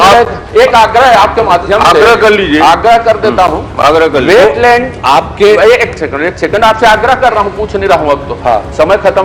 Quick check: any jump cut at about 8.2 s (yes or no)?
no